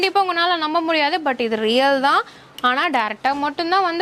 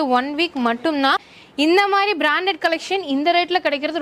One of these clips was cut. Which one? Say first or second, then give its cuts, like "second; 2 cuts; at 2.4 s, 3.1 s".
second; 1 cut; at 1.3 s